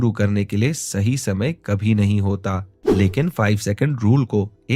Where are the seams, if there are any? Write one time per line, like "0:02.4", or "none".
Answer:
0:02.7